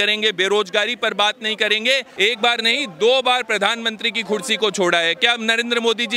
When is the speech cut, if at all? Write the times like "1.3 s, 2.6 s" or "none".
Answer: 2.1 s